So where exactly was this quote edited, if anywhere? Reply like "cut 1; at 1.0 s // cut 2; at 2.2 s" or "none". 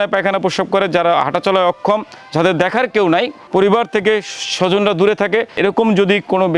cut 1; at 5.6 s